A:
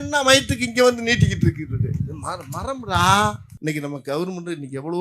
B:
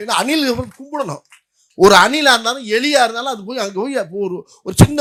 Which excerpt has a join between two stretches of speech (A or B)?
A